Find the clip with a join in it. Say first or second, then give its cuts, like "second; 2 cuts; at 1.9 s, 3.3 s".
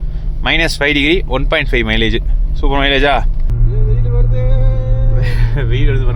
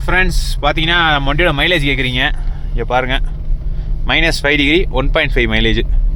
first; 1 cut; at 3.5 s